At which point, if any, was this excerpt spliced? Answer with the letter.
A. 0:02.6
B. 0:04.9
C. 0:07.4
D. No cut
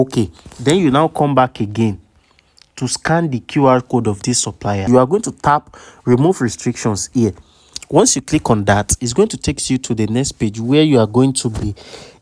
B